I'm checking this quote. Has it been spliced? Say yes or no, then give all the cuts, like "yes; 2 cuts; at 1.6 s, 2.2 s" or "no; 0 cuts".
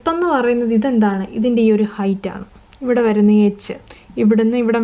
no; 0 cuts